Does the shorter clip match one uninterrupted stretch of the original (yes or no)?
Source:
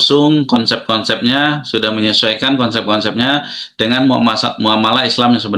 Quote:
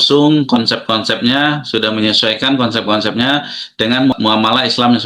no